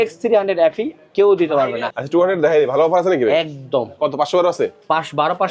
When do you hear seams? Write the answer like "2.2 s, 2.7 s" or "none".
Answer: 1.9 s